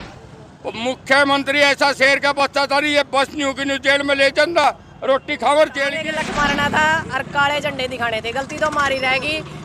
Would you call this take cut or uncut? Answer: cut